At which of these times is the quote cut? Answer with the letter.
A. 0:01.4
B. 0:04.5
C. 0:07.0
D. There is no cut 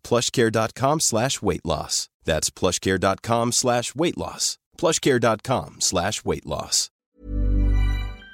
C